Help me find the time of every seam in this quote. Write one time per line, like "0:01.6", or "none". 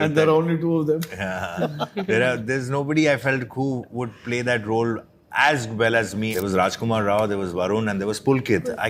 0:06.3